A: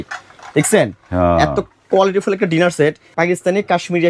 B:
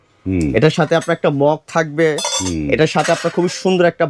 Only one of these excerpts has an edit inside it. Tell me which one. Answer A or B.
A